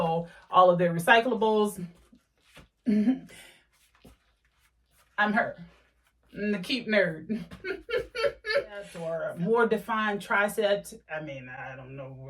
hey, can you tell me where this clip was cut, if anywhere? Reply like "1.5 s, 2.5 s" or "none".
9.0 s